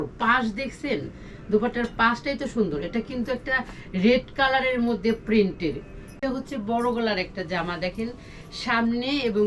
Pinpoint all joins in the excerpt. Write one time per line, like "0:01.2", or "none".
0:06.2